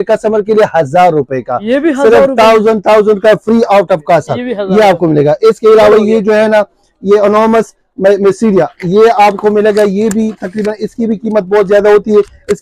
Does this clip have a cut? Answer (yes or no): no